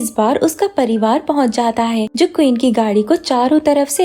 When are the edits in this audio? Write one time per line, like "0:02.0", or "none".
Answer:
none